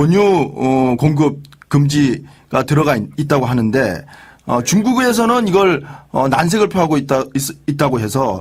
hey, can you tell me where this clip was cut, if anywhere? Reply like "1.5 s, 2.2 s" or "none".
none